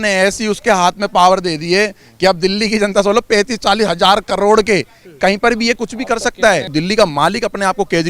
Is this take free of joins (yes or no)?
no